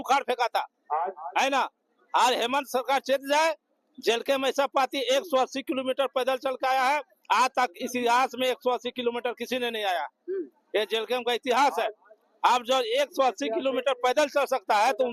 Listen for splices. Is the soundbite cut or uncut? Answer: uncut